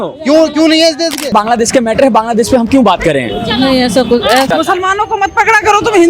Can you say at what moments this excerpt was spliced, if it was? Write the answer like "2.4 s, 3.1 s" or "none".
1.3 s, 4.5 s